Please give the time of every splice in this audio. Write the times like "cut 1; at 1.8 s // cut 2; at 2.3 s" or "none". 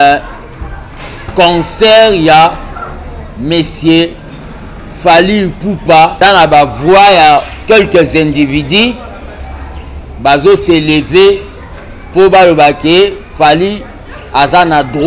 cut 1; at 6.1 s